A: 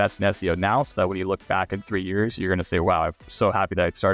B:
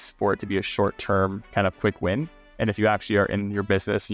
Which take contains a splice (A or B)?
B